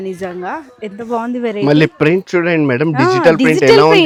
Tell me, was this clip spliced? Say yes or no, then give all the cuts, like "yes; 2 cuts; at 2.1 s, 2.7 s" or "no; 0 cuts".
no; 0 cuts